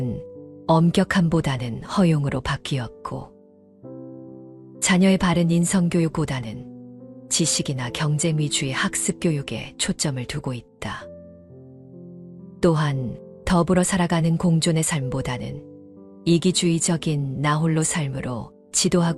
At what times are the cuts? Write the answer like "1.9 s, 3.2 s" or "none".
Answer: none